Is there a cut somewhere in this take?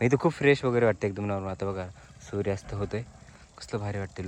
no; 0 cuts

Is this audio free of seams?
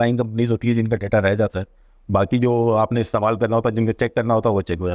yes; 0 cuts

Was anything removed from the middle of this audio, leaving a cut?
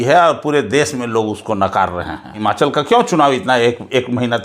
yes; 1 cut; at 2.4 s

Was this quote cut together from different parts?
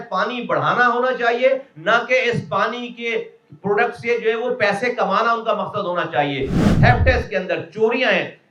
yes; 1 cut; at 6.6 s

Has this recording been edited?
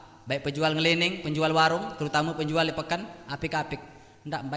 no; 0 cuts

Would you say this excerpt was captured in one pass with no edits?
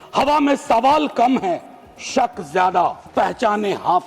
no; 1 cut; at 3.0 s

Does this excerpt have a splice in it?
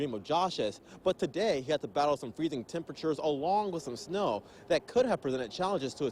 no; 0 cuts

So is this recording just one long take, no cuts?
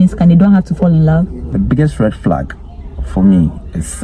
no; 1 cut; at 1.4 s

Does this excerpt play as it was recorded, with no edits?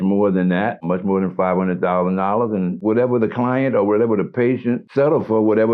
no; 3 cuts; at 0.8 s, 2.8 s, 4.9 s

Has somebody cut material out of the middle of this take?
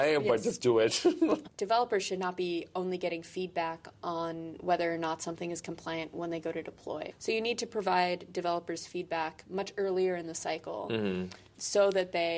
yes; 2 cuts; at 1.5 s, 7.1 s

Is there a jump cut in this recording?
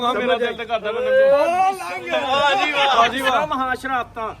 yes; 1 cut; at 3.0 s

